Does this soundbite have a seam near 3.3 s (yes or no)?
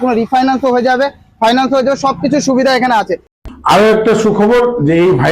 yes